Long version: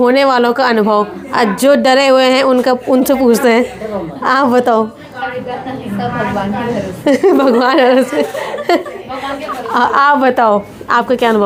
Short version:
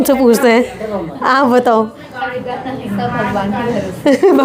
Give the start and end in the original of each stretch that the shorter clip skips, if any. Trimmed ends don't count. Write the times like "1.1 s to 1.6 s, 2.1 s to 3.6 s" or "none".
none